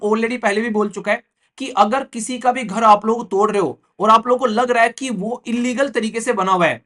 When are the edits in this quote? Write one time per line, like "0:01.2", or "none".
none